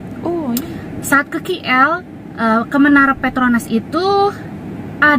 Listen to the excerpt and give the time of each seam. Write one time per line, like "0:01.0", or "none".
none